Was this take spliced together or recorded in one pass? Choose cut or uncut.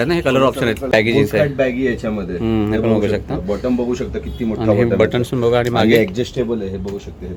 cut